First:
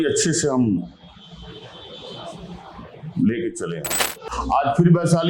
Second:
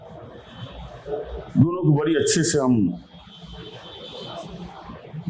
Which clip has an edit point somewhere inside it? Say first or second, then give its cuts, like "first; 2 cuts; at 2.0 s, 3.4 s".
first; 1 cut; at 4.1 s